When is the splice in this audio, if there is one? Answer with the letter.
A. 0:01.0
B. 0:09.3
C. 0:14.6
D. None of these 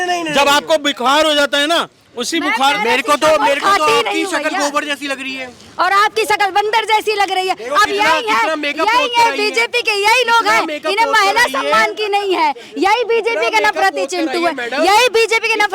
D